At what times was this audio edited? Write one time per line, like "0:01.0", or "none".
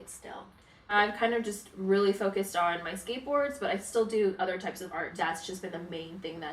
0:00.9
0:05.1